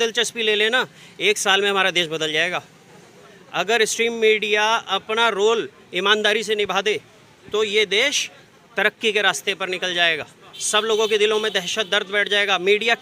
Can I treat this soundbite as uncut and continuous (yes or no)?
yes